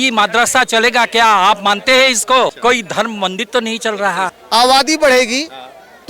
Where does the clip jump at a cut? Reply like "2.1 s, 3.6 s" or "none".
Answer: 2.6 s, 4.3 s